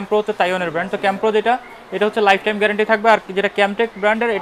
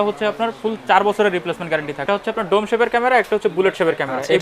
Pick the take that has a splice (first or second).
second